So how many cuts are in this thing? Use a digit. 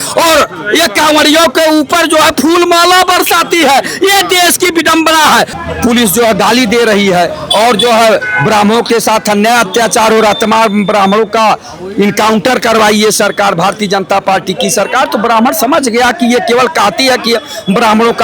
1